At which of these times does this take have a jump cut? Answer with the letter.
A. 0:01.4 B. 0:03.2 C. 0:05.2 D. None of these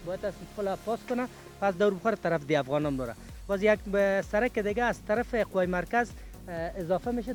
D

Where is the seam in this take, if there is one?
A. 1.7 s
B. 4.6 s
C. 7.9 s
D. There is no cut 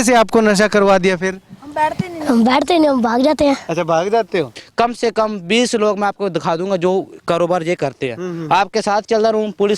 B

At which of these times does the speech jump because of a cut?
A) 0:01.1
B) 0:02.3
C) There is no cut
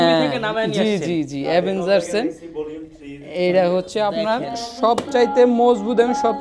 C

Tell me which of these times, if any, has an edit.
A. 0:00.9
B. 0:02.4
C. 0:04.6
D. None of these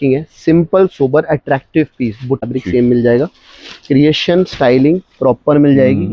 B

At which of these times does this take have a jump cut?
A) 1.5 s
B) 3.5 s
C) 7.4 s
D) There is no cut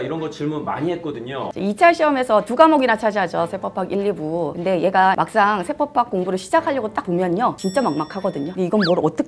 A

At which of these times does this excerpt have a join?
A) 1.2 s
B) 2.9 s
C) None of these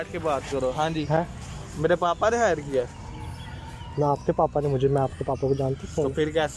C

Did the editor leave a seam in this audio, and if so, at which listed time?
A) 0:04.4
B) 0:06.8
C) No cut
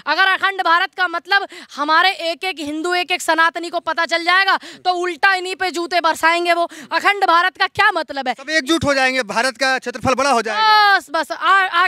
C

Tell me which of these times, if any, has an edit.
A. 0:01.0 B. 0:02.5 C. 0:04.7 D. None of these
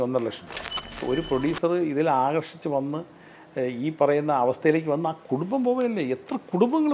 A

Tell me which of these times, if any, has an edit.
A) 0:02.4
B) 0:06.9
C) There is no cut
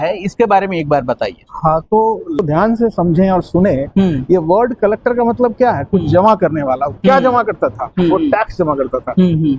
A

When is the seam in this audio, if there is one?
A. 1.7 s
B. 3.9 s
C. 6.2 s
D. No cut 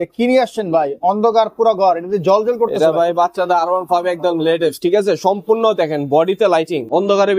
D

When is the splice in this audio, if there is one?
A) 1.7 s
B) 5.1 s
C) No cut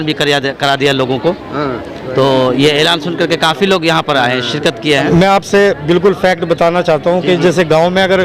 B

